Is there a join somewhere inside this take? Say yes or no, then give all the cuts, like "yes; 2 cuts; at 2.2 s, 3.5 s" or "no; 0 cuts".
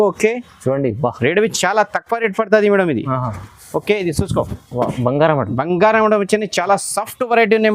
no; 0 cuts